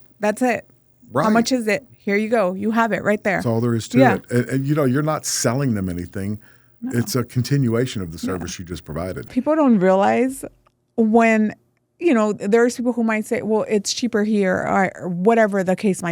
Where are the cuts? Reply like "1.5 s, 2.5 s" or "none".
9.3 s